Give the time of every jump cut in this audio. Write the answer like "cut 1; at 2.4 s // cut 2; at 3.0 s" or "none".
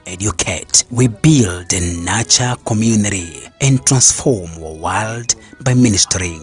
none

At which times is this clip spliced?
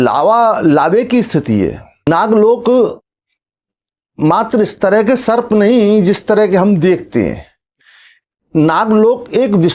cut 1; at 2.1 s

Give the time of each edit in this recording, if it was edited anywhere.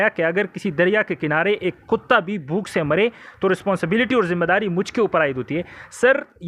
none

